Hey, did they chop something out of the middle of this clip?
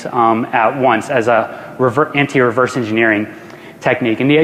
yes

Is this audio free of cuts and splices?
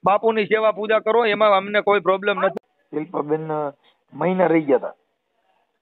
no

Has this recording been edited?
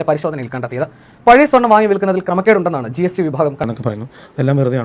yes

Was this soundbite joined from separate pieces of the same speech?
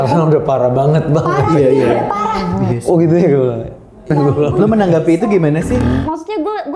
yes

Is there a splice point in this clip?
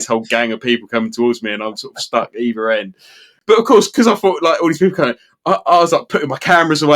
yes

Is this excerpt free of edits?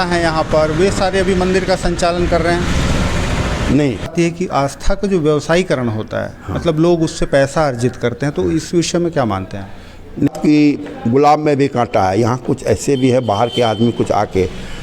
no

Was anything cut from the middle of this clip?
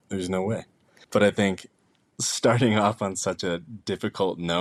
no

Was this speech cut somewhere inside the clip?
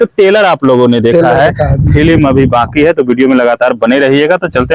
no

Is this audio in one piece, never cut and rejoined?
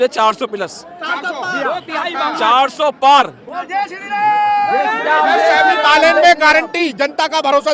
yes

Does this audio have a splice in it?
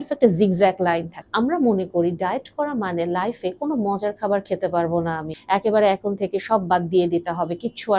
yes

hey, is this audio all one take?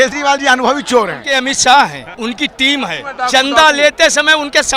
no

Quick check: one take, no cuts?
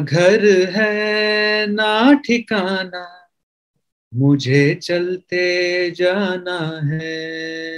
yes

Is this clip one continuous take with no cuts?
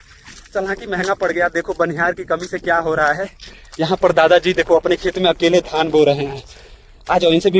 yes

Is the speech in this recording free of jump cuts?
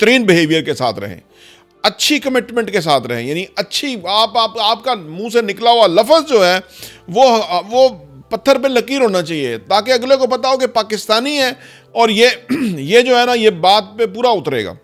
yes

